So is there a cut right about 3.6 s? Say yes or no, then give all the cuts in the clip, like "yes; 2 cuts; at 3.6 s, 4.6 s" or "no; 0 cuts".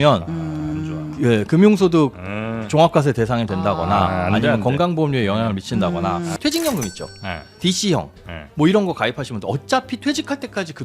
no; 1 cut; at 6.3 s